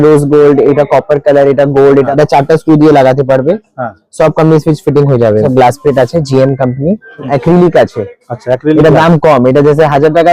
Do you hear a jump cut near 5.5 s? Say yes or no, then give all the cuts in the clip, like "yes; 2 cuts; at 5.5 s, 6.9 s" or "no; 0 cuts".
yes; 3 cuts; at 2.1 s, 5.5 s, 7.3 s